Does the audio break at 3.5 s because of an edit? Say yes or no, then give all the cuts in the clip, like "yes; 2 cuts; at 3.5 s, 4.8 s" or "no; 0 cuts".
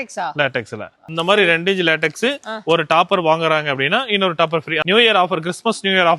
no; 2 cuts; at 1.1 s, 4.8 s